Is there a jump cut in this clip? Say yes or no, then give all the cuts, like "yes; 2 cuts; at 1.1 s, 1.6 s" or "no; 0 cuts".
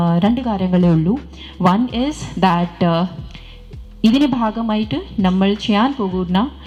no; 0 cuts